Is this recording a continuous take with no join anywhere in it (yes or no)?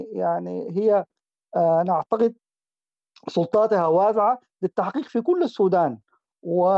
yes